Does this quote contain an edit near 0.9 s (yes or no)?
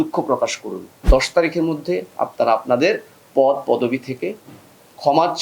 yes